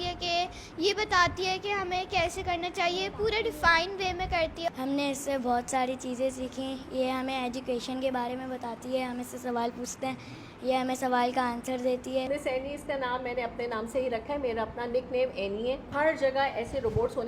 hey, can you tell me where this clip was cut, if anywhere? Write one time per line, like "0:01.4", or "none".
0:04.7
0:12.3
0:15.9